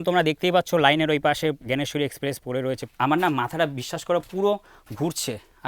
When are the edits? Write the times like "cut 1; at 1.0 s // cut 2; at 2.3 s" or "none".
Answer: cut 1; at 2.9 s